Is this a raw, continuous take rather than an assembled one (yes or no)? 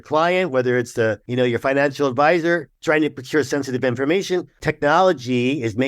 no